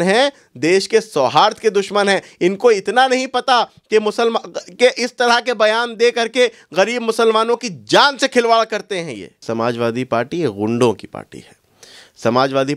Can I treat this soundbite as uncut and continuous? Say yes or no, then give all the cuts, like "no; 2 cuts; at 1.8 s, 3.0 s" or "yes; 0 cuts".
no; 1 cut; at 9.4 s